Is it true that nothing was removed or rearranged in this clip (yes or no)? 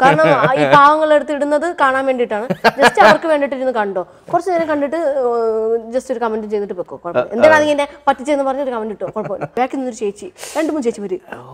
no